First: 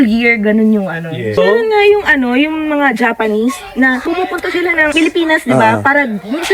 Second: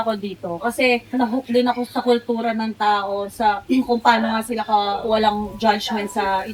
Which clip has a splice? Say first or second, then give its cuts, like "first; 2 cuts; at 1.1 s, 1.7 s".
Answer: first; 1 cut; at 1.4 s